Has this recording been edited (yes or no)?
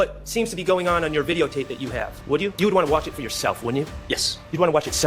yes